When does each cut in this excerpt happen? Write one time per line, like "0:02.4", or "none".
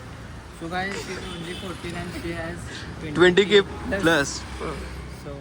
none